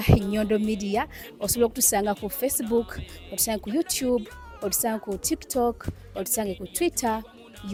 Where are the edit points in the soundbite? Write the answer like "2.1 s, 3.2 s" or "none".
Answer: none